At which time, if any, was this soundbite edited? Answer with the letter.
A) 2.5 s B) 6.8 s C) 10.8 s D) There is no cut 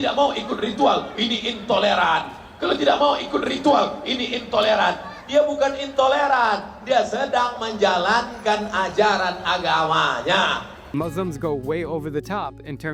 C